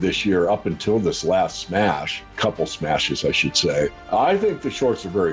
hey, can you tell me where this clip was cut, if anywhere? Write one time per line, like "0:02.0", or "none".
0:02.3
0:04.0